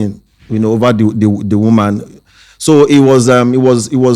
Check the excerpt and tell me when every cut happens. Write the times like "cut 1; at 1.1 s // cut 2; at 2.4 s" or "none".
none